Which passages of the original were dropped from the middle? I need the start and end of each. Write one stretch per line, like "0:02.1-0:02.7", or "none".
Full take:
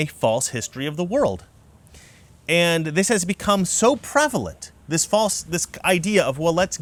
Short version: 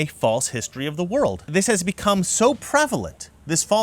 0:01.5-0:02.9

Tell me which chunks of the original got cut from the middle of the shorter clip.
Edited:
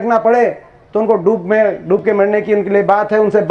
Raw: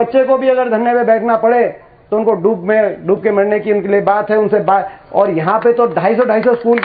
none

